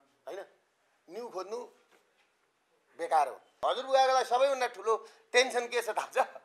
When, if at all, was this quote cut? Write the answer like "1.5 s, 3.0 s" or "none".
3.5 s